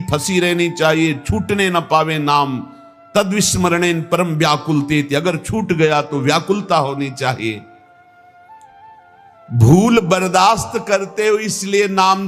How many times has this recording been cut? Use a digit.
2